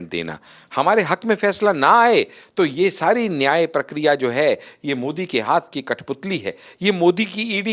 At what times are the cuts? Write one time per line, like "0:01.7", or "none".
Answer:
none